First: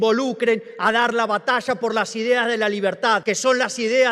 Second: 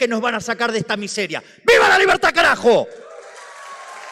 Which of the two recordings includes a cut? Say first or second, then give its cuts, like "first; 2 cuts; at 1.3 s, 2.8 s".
first; 1 cut; at 3.2 s